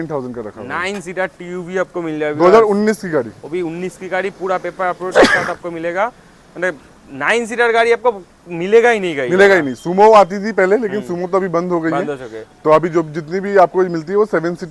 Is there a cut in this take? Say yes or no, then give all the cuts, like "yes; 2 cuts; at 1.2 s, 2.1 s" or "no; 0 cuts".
no; 0 cuts